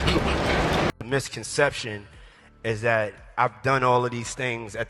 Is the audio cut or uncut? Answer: cut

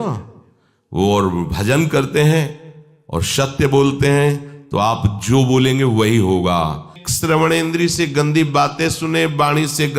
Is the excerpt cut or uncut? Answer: cut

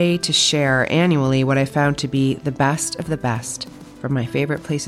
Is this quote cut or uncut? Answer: uncut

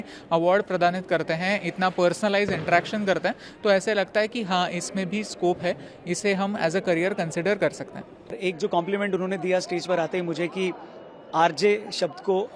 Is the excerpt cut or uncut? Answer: uncut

